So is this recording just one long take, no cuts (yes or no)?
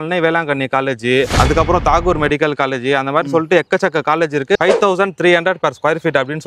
no